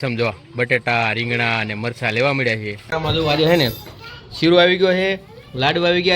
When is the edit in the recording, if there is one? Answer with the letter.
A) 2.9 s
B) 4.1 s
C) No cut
A